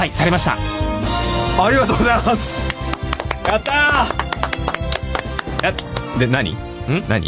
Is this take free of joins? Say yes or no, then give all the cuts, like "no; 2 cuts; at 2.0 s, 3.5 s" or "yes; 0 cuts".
yes; 0 cuts